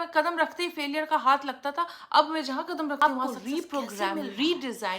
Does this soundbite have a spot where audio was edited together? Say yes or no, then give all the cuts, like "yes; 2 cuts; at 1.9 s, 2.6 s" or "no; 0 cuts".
yes; 1 cut; at 3.0 s